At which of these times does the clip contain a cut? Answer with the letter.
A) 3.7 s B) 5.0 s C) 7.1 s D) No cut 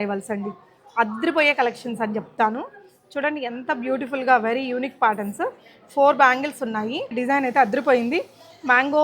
C